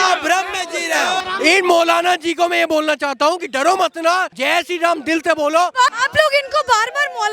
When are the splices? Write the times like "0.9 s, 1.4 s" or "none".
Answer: 4.3 s, 5.9 s